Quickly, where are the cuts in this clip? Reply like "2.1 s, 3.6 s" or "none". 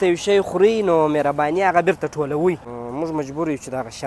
2.7 s